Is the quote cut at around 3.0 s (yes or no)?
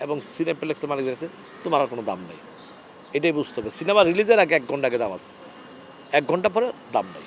no